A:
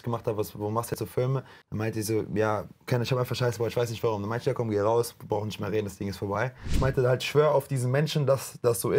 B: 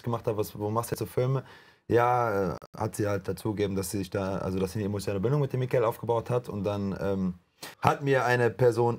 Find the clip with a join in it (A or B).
A